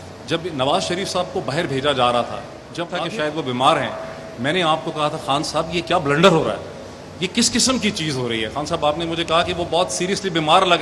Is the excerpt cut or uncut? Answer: cut